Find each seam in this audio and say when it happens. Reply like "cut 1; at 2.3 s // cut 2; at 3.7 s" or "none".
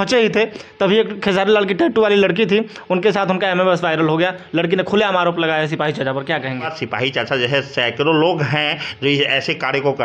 cut 1; at 6.8 s

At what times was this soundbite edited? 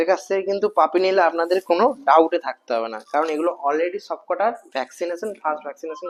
none

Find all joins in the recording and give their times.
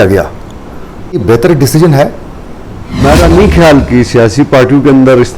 cut 1; at 1.2 s // cut 2; at 3.0 s

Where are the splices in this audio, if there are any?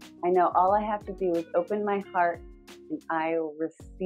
none

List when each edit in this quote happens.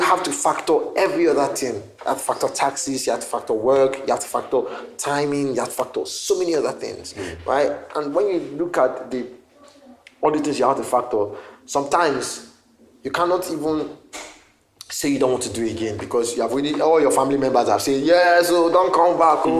none

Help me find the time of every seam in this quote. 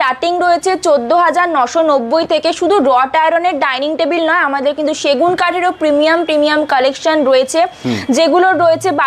none

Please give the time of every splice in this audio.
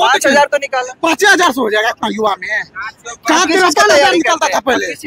none

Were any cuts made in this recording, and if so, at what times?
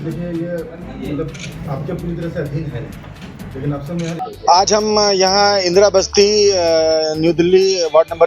cut 1; at 4.2 s

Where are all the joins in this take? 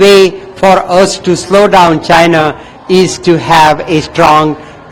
none

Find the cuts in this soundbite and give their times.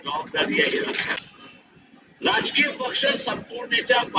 cut 1; at 1.3 s

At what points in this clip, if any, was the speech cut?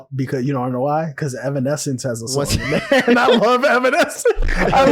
none

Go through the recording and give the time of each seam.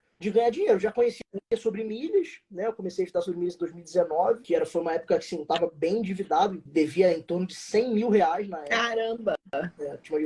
cut 1; at 4.4 s // cut 2; at 6.6 s

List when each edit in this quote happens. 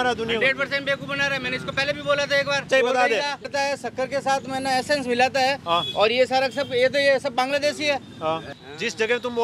cut 1; at 2.7 s // cut 2; at 3.5 s // cut 3; at 8.5 s

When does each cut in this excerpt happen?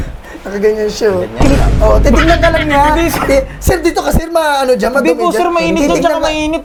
none

